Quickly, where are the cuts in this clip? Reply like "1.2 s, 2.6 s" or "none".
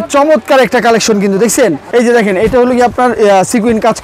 1.8 s